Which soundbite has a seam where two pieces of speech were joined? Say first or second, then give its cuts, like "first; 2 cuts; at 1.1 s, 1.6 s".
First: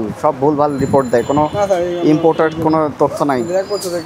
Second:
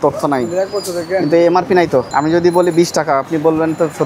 second; 1 cut; at 2.1 s